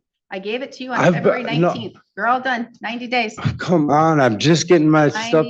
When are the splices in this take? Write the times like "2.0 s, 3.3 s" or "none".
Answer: none